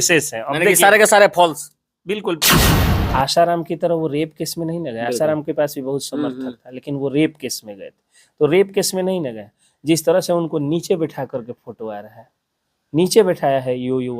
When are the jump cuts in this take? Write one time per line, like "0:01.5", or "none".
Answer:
0:02.8